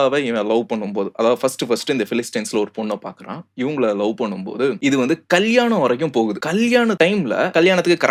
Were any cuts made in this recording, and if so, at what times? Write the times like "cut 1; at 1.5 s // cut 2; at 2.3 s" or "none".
none